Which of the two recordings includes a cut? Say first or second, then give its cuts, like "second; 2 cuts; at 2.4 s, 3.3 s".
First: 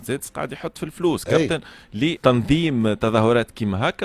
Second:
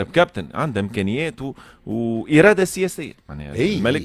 first; 1 cut; at 2.2 s